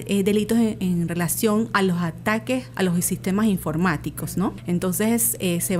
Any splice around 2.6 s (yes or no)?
no